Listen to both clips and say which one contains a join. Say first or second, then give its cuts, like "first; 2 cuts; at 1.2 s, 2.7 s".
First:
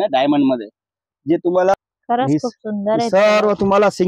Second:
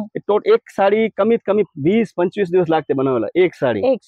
first; 1 cut; at 1.7 s